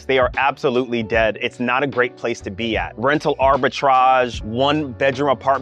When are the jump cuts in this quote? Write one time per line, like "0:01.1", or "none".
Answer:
0:02.9
0:04.4